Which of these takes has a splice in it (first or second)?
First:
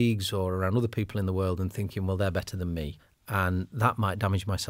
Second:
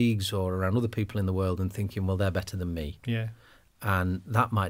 first